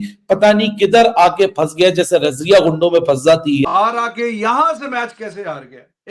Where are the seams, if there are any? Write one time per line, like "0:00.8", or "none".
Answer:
0:03.7